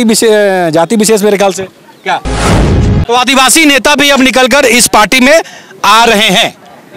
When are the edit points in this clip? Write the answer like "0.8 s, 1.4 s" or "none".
2.7 s

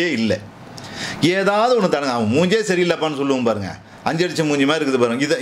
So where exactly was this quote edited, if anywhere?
none

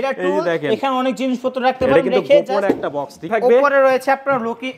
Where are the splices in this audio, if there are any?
3.3 s

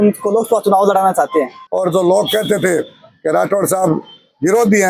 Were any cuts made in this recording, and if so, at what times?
1.6 s

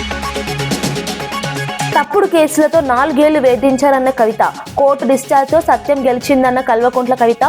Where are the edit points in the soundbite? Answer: 1.9 s

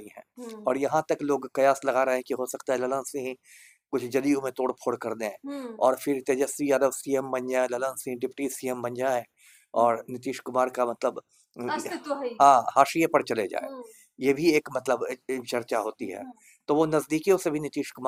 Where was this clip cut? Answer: none

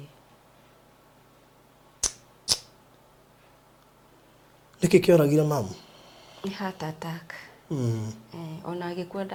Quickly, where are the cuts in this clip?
none

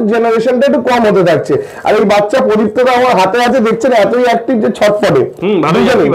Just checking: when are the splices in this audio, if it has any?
none

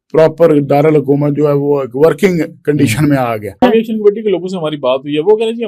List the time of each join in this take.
3.6 s

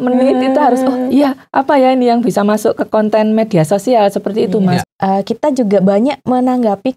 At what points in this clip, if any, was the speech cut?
4.8 s

